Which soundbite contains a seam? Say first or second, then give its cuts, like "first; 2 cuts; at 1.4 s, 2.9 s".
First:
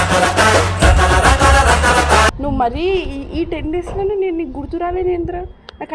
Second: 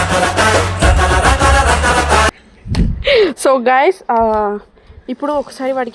first; 1 cut; at 2.4 s